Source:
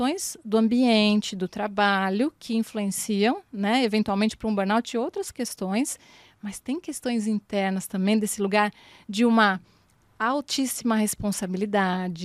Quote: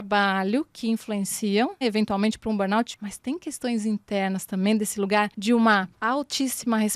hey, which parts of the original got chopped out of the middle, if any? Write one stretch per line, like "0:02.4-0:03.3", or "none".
0:03.5-0:03.8
0:04.9-0:06.3
0:08.8-0:09.1
0:09.7-0:10.1